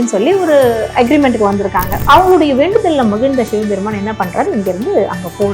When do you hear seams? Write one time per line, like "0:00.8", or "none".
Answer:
0:02.0